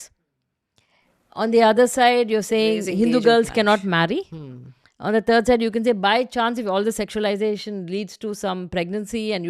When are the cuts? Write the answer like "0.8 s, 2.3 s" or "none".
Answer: none